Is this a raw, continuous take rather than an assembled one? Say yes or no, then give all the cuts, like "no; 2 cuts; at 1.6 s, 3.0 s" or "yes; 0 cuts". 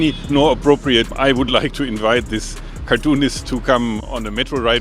no; 1 cut; at 1.1 s